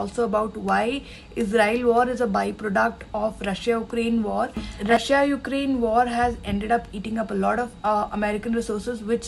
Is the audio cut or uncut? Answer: cut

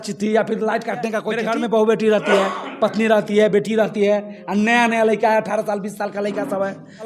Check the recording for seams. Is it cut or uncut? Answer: cut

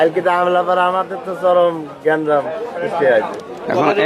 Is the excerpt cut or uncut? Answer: uncut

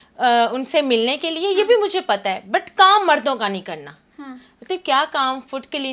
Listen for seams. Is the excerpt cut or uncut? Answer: uncut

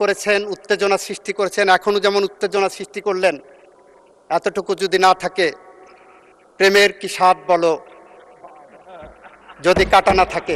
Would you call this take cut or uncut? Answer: uncut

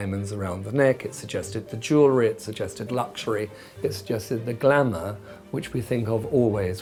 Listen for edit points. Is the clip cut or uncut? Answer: uncut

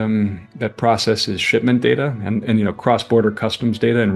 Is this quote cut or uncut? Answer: uncut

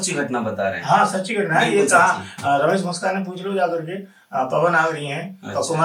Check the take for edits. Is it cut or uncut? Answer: uncut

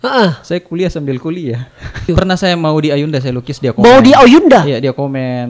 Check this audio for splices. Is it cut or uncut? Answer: cut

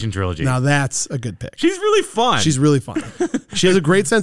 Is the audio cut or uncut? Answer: uncut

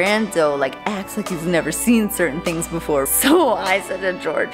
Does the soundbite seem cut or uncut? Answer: cut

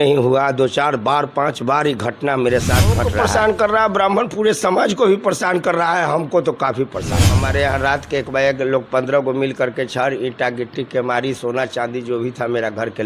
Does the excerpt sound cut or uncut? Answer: cut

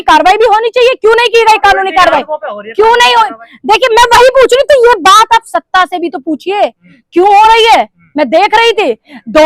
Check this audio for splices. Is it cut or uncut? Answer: uncut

